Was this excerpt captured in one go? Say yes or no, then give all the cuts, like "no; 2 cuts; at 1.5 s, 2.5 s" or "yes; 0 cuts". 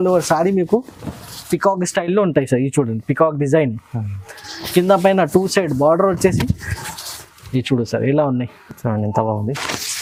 yes; 0 cuts